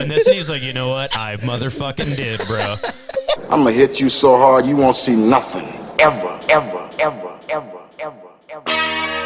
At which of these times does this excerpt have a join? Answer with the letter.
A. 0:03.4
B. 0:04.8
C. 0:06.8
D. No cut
A